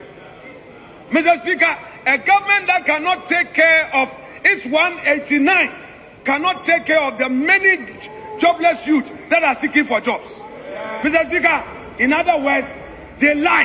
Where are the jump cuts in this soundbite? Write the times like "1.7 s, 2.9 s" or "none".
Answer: 11.0 s